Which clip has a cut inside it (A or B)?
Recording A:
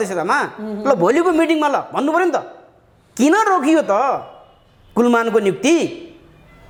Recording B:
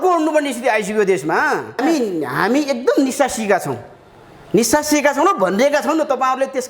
B